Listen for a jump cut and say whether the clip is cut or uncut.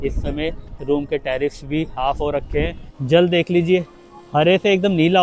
cut